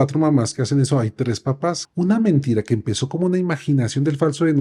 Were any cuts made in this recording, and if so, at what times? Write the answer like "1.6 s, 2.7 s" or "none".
1.8 s